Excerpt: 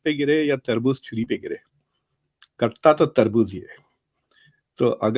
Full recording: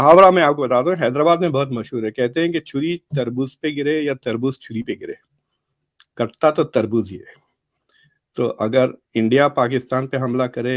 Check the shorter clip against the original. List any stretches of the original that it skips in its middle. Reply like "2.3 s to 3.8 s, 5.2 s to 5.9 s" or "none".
none